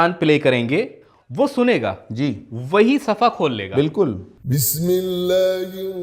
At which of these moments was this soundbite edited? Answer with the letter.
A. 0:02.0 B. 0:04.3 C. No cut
B